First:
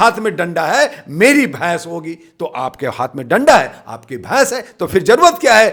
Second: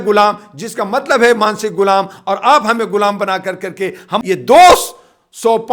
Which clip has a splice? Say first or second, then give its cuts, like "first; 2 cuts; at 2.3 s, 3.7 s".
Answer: second; 1 cut; at 4.1 s